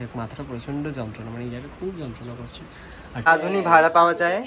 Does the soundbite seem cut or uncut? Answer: cut